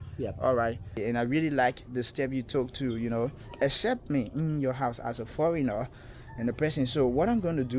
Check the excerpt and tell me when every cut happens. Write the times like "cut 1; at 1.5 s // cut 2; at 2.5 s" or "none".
cut 1; at 0.9 s